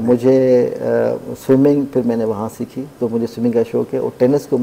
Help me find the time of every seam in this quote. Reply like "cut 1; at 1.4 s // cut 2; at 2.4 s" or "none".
none